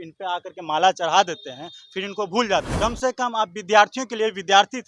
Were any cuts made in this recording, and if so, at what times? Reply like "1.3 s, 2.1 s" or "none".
2.7 s